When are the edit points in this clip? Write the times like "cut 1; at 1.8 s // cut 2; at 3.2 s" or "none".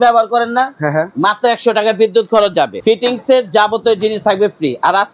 cut 1; at 2.8 s